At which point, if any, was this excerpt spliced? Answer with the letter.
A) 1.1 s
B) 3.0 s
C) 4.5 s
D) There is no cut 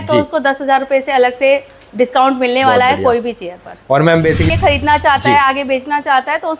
C